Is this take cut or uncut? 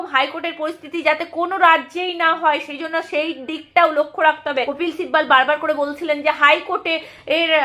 cut